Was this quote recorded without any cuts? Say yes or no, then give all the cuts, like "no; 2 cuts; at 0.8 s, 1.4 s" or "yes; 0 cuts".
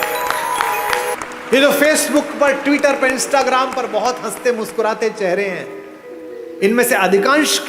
no; 1 cut; at 1.2 s